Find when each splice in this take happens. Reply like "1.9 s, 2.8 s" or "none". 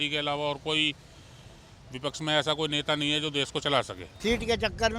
4.0 s